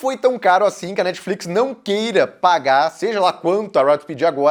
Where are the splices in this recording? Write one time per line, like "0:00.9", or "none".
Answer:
none